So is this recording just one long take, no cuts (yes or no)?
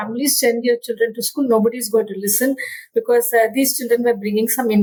yes